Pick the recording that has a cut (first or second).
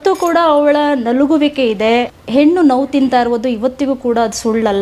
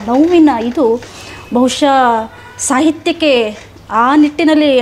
first